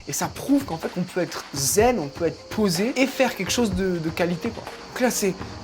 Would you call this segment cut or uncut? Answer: cut